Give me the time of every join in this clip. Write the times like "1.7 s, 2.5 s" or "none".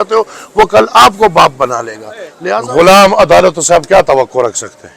2.4 s